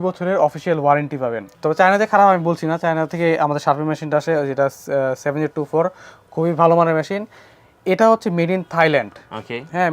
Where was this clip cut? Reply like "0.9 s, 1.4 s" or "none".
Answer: 1.5 s